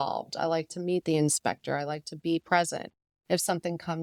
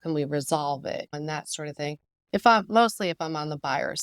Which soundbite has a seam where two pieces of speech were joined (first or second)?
second